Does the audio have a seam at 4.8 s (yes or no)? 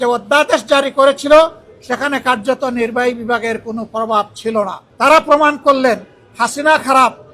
yes